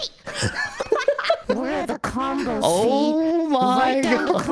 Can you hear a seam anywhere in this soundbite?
yes; 1 cut; at 1.4 s

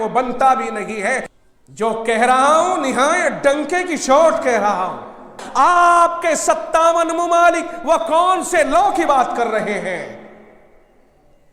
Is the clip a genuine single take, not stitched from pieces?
no; 2 cuts; at 1.3 s, 5.4 s

